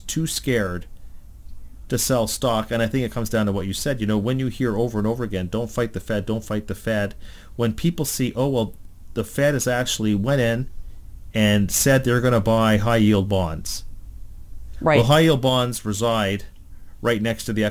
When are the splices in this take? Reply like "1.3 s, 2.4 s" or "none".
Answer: none

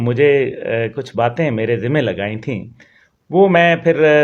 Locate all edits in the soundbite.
none

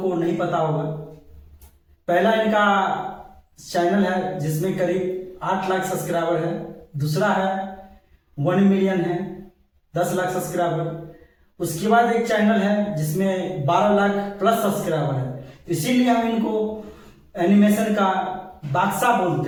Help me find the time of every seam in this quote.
none

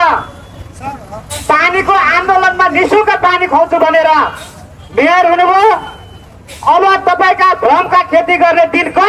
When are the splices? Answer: none

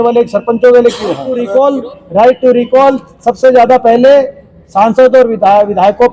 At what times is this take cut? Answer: 1.3 s

